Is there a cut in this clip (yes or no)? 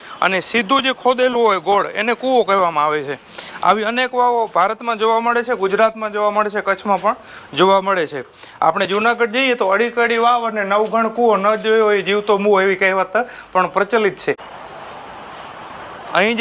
yes